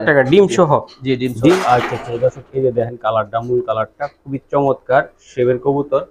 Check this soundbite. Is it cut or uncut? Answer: cut